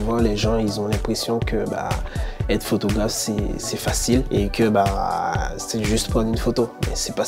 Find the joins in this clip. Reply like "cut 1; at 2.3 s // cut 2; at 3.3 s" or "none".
none